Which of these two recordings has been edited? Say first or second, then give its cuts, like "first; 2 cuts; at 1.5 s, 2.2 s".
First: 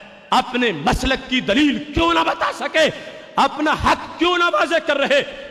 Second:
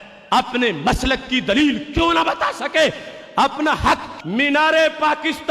second; 1 cut; at 4.1 s